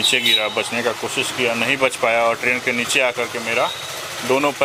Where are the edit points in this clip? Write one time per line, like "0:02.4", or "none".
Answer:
none